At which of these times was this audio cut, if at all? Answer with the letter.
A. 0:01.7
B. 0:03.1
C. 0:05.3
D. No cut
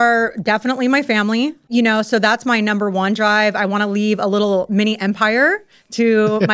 A